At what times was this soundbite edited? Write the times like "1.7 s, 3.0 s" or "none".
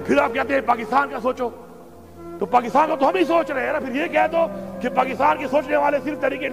none